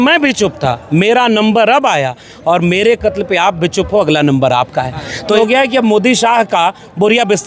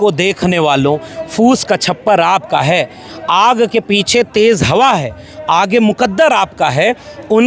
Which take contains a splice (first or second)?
first